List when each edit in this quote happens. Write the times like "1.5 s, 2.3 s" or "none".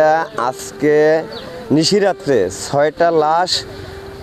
none